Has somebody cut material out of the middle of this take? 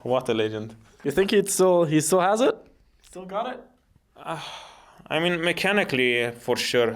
yes; 1 cut; at 0.9 s

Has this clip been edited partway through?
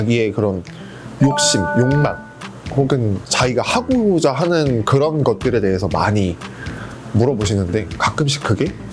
no; 0 cuts

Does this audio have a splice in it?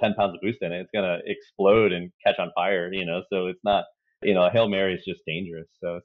no; 0 cuts

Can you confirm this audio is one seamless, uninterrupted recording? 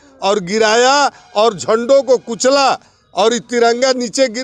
yes; 0 cuts

